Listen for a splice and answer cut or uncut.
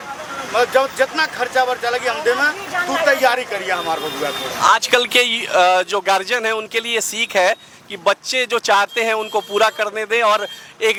uncut